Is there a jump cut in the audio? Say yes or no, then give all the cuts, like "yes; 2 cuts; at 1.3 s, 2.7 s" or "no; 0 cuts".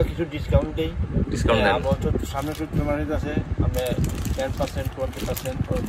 no; 0 cuts